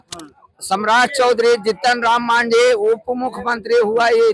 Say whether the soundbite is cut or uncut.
uncut